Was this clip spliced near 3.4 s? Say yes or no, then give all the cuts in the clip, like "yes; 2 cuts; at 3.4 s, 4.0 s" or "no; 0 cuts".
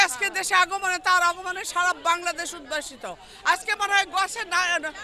no; 0 cuts